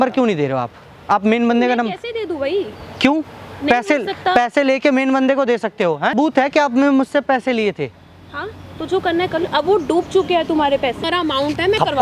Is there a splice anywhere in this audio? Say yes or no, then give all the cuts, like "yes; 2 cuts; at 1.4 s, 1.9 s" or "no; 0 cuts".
yes; 2 cuts; at 6.1 s, 11.1 s